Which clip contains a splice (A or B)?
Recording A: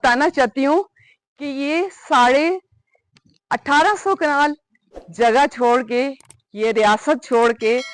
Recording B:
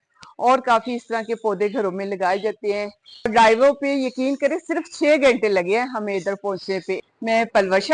B